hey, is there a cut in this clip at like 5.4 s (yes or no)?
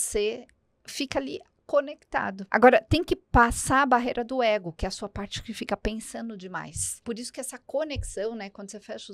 no